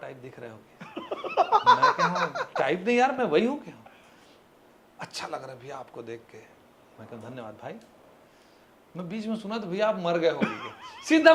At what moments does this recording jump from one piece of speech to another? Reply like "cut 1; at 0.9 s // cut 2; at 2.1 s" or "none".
none